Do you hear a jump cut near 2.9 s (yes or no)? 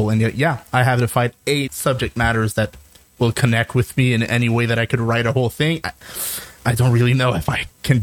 no